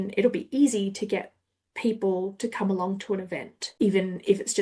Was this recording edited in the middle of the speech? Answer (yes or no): yes